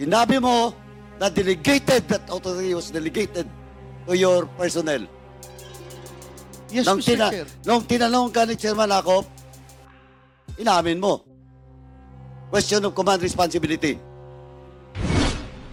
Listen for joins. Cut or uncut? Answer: uncut